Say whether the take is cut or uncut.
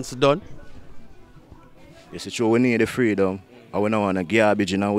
uncut